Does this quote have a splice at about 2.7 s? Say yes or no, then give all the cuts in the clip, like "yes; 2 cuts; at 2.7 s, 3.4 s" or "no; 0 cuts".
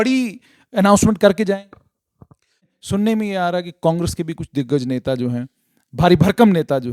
yes; 1 cut; at 2.7 s